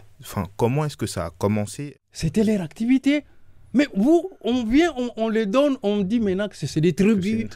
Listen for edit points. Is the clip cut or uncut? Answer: cut